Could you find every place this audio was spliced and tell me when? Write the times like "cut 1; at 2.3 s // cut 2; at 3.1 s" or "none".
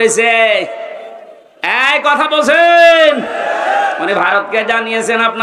cut 1; at 4.0 s

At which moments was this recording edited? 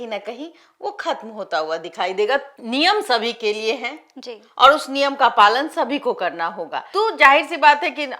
cut 1; at 2.5 s // cut 2; at 6.8 s

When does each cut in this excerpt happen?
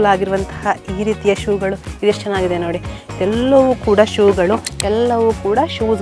cut 1; at 4.7 s

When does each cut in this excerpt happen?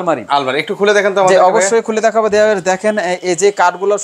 none

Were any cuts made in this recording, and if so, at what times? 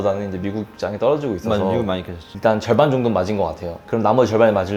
cut 1; at 2.3 s

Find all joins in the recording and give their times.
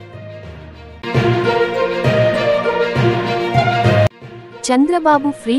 cut 1; at 1.0 s // cut 2; at 4.2 s

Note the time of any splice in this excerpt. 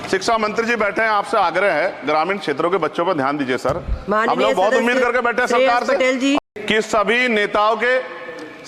cut 1; at 6.4 s

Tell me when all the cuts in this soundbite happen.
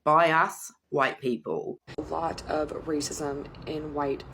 cut 1; at 1.9 s

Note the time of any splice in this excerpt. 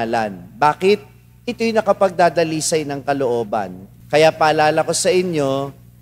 cut 1; at 3.8 s

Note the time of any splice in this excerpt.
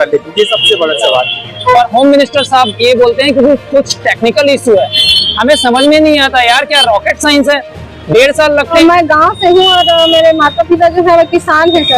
cut 1; at 1.7 s // cut 2; at 8.7 s

